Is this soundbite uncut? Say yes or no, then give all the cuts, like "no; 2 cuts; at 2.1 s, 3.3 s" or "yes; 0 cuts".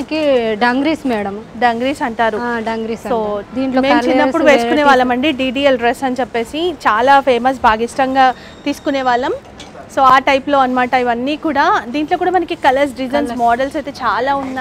yes; 0 cuts